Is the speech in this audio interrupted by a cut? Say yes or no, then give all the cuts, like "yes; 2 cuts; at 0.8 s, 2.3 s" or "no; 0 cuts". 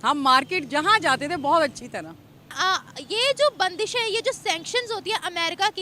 yes; 1 cut; at 2.4 s